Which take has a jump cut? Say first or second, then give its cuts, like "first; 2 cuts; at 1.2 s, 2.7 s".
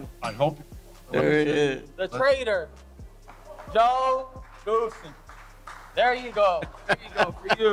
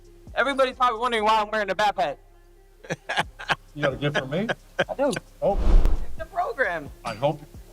second; 1 cut; at 5.8 s